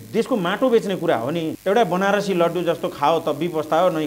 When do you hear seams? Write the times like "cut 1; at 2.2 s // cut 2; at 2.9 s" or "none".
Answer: cut 1; at 1.5 s